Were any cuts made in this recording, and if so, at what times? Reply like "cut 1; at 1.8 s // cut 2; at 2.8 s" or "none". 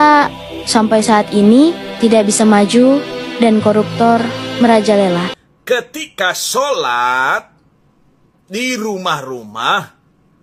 cut 1; at 5.4 s